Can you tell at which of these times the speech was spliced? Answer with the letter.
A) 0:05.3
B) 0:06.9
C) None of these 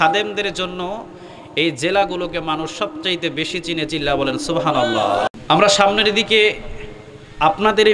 A